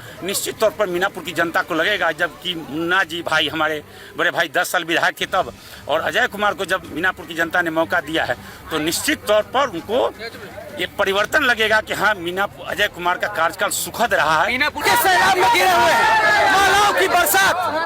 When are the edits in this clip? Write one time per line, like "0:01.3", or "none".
0:14.8